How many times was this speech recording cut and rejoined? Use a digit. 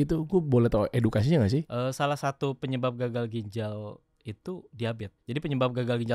2